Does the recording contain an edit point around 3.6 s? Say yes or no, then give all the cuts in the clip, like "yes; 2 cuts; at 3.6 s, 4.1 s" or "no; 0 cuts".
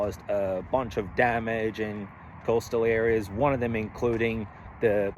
no; 0 cuts